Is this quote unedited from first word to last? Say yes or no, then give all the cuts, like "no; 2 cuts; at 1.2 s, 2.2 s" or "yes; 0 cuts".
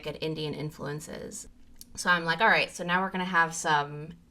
no; 1 cut; at 1.4 s